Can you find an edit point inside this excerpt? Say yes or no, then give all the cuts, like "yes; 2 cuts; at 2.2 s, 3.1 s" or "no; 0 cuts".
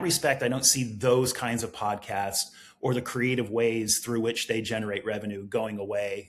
no; 0 cuts